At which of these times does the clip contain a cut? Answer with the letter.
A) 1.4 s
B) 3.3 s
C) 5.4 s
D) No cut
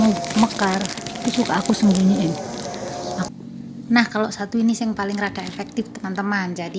B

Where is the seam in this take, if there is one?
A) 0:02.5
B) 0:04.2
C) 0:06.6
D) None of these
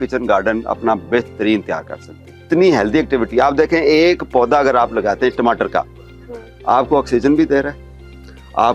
A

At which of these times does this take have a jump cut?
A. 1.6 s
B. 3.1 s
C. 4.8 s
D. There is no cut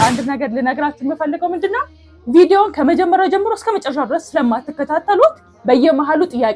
D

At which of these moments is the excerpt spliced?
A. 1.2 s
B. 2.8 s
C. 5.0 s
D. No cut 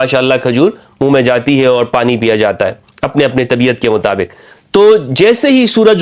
D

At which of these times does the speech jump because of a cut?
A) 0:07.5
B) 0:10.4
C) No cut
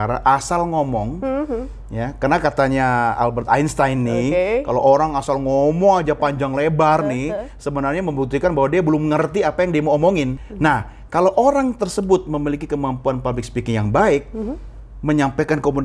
B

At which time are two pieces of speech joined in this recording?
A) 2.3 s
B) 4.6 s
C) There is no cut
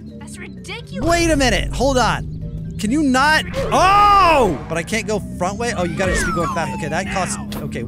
B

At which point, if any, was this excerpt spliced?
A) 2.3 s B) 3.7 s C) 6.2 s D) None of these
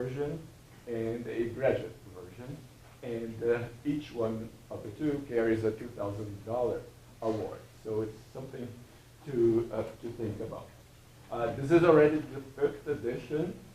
D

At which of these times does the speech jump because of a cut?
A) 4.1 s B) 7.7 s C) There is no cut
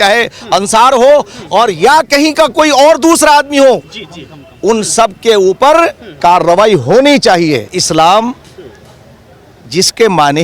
B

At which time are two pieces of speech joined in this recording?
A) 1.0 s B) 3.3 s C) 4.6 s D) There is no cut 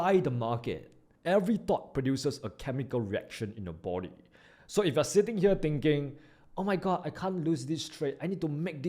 A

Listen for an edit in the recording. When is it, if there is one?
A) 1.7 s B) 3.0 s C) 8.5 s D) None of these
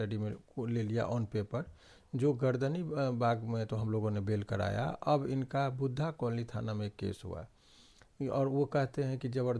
D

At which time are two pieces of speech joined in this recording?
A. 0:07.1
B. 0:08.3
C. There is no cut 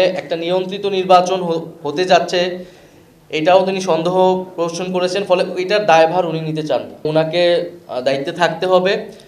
A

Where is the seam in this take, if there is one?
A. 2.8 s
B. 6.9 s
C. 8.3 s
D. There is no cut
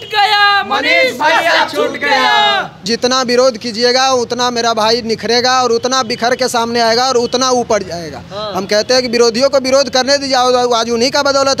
A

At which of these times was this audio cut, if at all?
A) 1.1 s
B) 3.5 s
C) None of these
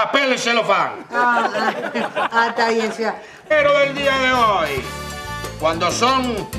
C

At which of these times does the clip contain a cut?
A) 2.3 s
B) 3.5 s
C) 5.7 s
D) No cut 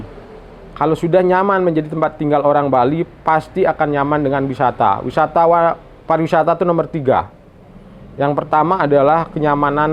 D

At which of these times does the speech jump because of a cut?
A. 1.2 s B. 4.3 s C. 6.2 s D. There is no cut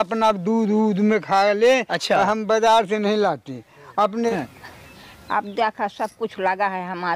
B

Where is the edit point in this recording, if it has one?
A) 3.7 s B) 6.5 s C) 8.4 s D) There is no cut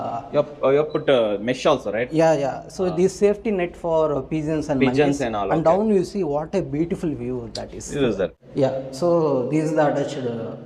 C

